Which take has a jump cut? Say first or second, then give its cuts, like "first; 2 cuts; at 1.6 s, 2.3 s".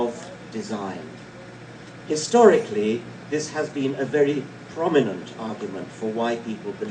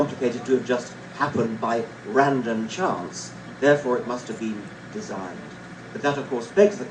second; 1 cut; at 4.6 s